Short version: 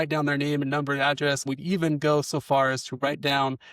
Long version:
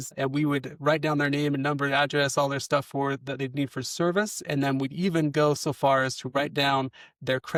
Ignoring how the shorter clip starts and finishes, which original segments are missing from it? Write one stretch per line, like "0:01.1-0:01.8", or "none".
0:02.3-0:04.7